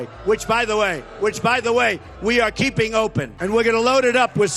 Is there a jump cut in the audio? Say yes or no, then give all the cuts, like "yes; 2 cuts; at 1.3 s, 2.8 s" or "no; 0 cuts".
yes; 1 cut; at 3.3 s